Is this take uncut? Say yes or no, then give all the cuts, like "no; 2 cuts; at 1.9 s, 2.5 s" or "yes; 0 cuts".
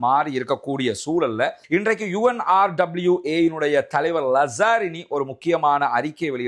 no; 1 cut; at 1.6 s